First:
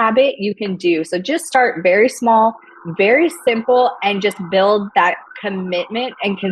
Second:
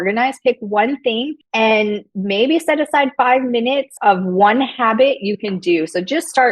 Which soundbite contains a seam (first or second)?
second